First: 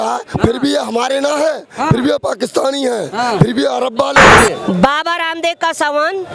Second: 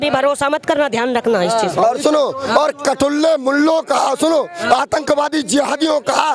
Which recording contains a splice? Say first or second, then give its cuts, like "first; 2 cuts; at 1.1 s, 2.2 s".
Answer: first; 1 cut; at 4.3 s